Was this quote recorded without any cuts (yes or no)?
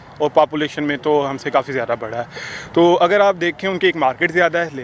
yes